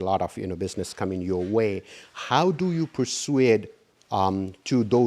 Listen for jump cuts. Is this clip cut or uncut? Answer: uncut